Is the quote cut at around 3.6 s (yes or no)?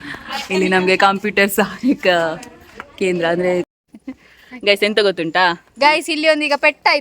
yes